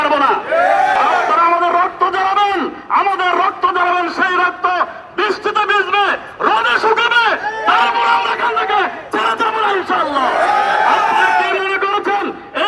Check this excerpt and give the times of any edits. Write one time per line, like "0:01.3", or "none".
0:00.9

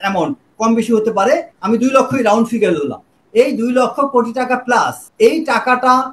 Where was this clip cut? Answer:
0:01.5
0:05.0

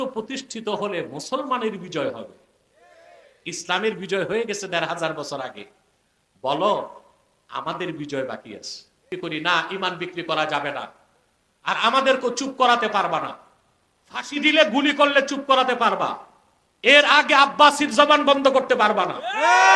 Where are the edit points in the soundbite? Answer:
0:09.0

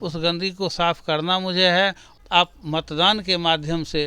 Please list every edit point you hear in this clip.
0:02.1

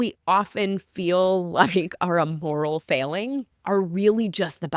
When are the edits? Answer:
0:03.5

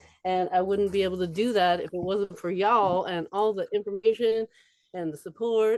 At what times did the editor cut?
none

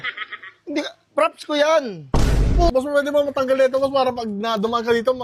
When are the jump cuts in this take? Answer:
0:02.7

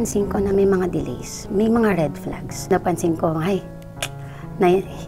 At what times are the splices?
0:02.7

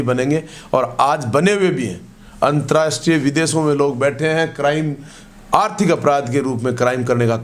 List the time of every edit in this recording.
none

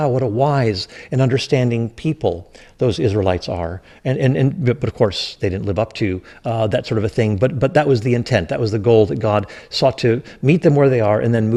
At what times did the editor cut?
none

